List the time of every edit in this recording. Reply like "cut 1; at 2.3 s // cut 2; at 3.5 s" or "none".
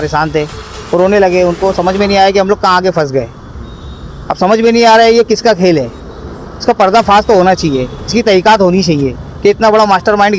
none